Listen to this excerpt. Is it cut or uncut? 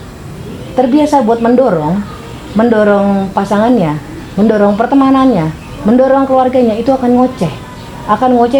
uncut